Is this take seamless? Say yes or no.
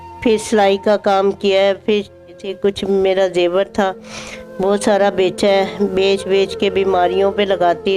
no